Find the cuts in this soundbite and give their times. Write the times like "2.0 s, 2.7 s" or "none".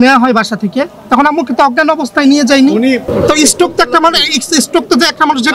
3.1 s

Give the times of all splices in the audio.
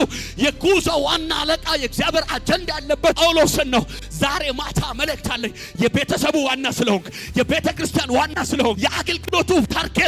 none

